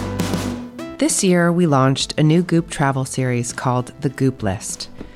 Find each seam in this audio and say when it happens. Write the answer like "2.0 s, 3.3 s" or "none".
0.9 s